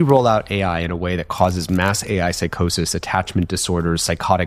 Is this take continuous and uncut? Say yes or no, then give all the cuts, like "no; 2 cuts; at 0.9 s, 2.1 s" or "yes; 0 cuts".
yes; 0 cuts